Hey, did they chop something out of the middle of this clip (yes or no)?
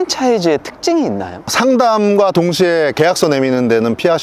no